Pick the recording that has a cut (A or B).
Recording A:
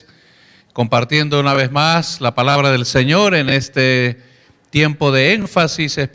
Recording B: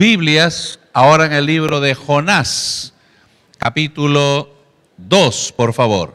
B